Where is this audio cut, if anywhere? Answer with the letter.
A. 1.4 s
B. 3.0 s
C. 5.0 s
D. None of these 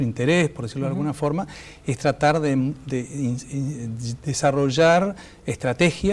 A